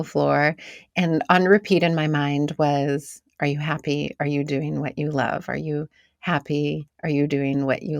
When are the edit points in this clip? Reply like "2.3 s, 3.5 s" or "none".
6.9 s